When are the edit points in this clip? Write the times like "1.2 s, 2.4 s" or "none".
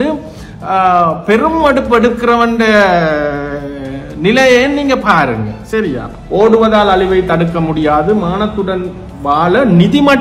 6.1 s

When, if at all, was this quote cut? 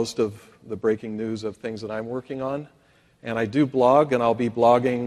2.8 s

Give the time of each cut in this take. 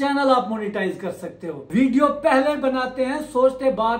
1.5 s

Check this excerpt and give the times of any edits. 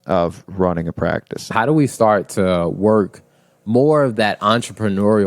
1.5 s

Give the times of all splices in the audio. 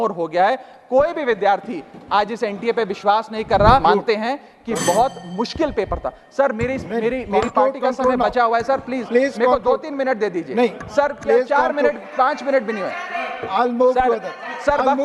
3.8 s

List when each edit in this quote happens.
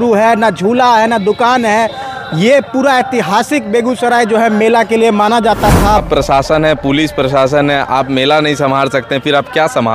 6.0 s

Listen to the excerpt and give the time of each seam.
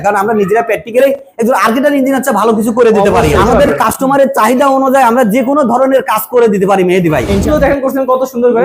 3.3 s, 7.4 s

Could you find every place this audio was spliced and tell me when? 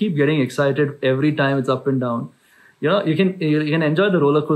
none

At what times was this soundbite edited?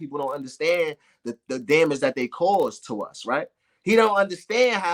none

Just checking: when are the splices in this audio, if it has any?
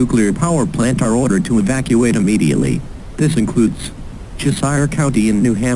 0.9 s

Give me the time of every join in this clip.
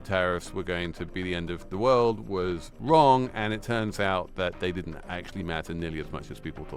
none

